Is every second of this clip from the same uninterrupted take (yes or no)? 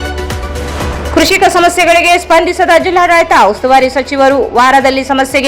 no